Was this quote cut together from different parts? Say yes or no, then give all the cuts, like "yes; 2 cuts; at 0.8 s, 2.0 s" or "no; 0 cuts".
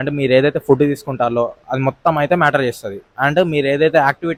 no; 0 cuts